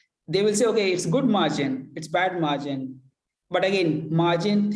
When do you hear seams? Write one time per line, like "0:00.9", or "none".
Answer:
none